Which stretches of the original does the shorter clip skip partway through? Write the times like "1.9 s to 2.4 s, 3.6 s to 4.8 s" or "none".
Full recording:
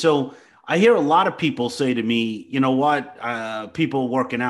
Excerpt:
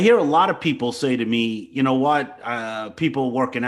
none